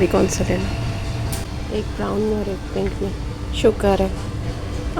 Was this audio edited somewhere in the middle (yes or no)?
yes